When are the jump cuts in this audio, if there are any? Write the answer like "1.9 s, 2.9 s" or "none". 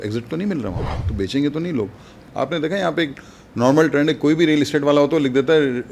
0.9 s, 2.2 s

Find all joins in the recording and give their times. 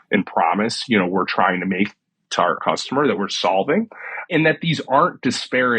2.6 s, 4.3 s

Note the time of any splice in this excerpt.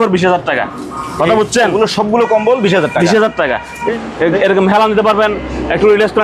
3.7 s

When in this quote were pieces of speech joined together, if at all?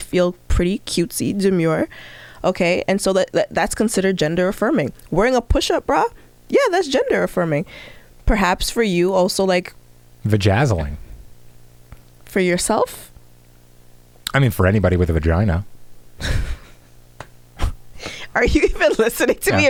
none

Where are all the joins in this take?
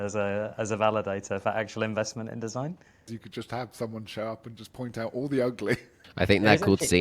3.1 s, 6.0 s

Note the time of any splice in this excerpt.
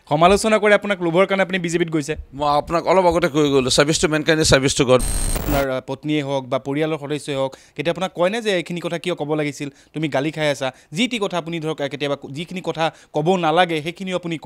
5.0 s

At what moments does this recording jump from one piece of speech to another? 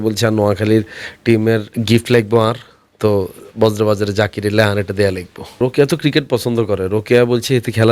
1.7 s, 5.6 s

